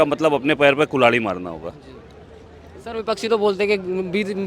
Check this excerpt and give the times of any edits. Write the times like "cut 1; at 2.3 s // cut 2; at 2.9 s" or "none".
none